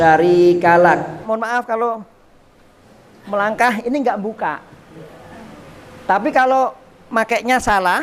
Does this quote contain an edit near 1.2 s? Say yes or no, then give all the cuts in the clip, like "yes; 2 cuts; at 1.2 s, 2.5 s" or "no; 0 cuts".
yes; 1 cut; at 1.2 s